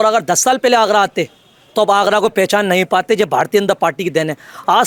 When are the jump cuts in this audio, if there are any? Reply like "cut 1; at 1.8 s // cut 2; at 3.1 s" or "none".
none